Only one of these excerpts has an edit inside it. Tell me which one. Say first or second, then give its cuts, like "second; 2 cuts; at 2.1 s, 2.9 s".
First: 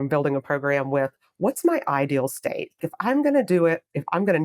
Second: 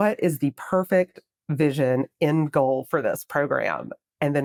first; 1 cut; at 2.8 s